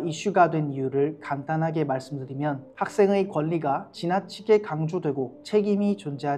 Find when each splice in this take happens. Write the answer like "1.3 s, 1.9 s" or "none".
2.7 s, 5.4 s